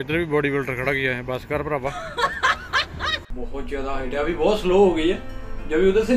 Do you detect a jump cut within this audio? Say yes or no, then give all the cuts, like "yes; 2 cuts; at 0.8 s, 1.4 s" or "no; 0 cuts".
yes; 1 cut; at 3.3 s